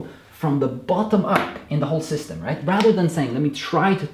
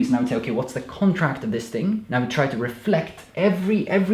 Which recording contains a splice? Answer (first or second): second